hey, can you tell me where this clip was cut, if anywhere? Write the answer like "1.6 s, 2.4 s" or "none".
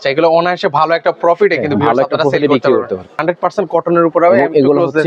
3.1 s